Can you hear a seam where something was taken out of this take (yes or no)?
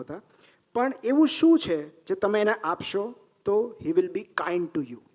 no